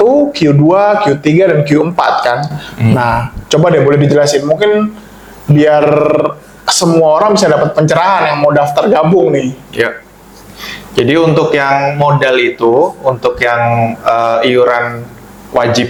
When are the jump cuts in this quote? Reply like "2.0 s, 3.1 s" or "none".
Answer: none